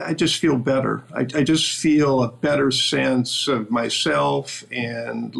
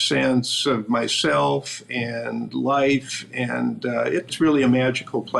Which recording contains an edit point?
second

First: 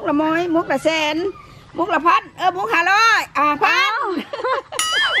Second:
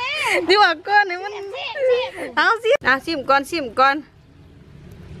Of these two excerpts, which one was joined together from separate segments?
second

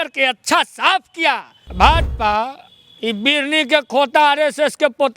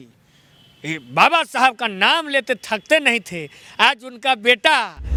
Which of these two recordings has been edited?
first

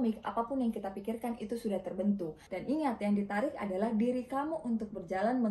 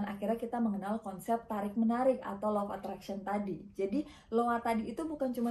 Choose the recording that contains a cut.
first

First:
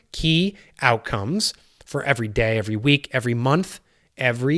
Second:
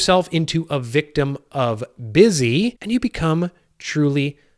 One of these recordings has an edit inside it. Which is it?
second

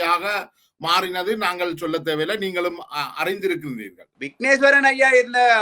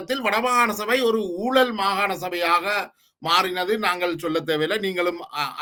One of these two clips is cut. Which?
first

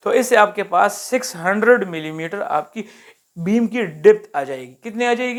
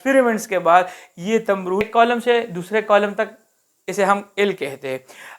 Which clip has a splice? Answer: second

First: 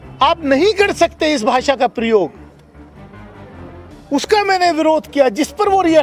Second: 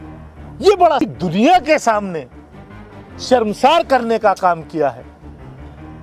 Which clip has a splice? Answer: second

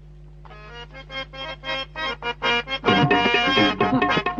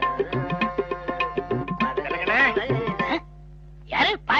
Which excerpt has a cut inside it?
first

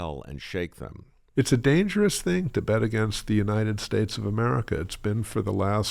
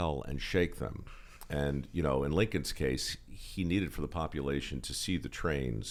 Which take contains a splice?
first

